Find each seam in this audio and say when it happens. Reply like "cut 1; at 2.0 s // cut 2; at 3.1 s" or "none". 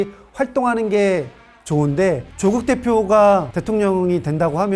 cut 1; at 2.3 s